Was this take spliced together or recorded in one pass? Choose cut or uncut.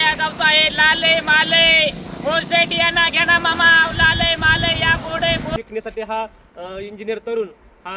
cut